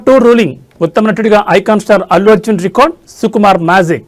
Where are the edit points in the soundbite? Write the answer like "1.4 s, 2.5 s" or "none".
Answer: none